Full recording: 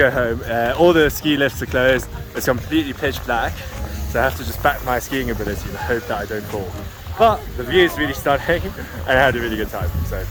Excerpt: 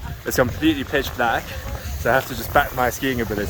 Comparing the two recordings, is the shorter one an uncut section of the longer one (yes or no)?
yes